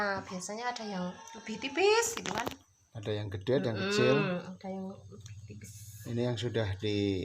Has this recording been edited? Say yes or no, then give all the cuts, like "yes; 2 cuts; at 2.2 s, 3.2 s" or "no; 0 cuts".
no; 0 cuts